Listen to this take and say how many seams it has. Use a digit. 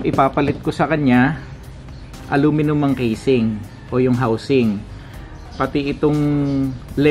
2